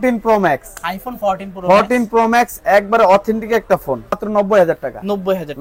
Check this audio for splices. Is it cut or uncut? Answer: cut